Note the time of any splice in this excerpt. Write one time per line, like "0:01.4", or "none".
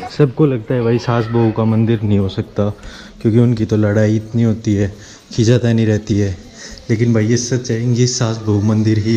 none

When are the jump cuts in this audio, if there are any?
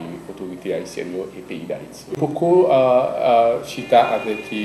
0:02.2

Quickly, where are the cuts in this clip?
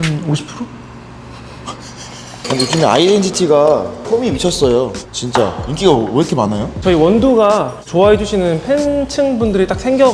0:02.4
0:06.7

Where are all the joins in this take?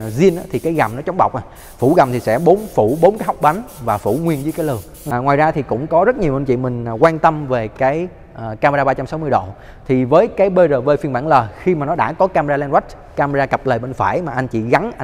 0:04.9

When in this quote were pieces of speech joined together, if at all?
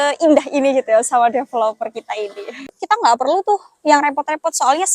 0:02.6

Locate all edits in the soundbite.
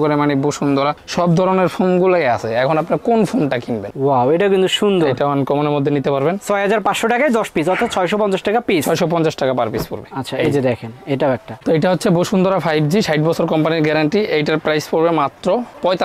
0:03.8
0:11.5

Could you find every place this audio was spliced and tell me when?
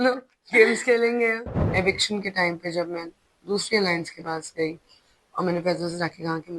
0:01.5

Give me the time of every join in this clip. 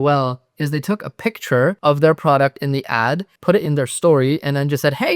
0:01.8

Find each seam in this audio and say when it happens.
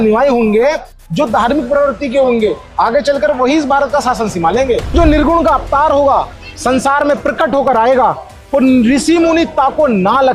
0:04.9

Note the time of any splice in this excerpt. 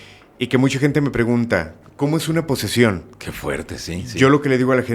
0:01.8

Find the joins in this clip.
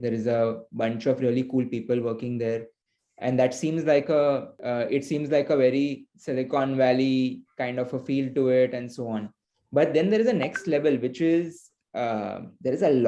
0:04.5

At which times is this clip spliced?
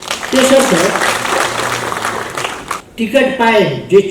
0:02.9

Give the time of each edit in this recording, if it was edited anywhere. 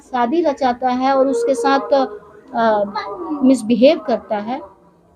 none

